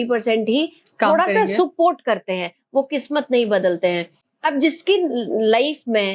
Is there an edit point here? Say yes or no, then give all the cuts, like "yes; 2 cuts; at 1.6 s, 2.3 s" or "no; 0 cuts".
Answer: no; 0 cuts